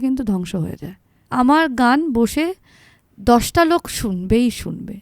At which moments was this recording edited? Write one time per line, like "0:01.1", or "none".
0:01.2